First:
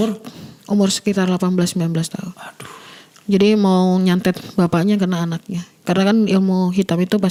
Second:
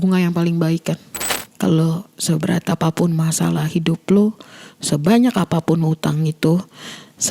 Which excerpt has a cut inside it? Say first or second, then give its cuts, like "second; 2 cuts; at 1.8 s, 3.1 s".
second; 1 cut; at 1.4 s